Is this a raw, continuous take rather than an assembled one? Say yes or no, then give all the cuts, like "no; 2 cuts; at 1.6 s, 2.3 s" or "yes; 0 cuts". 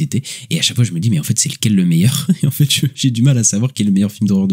no; 1 cut; at 2.9 s